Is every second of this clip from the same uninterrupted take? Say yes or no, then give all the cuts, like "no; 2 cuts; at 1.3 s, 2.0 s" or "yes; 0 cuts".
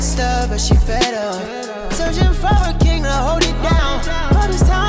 yes; 0 cuts